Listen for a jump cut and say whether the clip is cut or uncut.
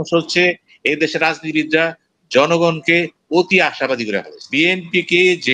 cut